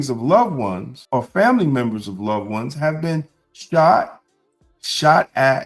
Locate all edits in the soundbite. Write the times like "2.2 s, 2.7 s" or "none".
0.9 s

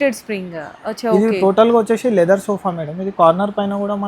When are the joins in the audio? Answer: none

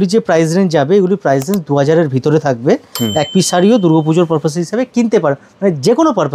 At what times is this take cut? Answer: 2.9 s

